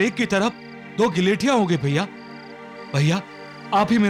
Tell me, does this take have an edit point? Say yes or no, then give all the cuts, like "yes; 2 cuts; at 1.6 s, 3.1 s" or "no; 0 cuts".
no; 0 cuts